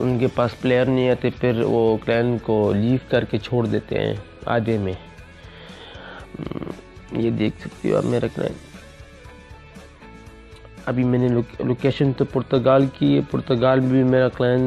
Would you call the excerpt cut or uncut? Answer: uncut